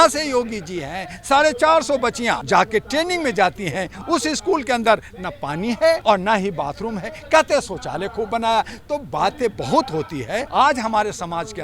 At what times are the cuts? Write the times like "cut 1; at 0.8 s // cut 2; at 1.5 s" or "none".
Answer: cut 1; at 2.4 s // cut 2; at 6.0 s // cut 3; at 10.5 s